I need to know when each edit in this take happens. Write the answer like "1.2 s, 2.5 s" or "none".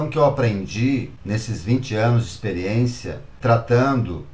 1.1 s, 3.3 s